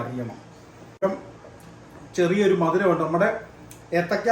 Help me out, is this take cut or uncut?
cut